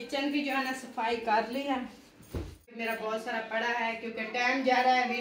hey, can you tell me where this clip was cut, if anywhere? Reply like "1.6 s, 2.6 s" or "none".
2.7 s